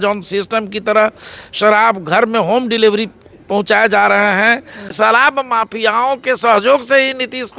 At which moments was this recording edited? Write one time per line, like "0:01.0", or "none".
0:04.8